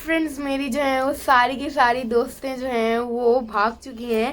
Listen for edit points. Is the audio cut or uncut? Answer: uncut